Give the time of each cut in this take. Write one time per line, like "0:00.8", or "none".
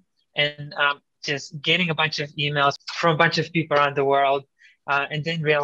0:02.9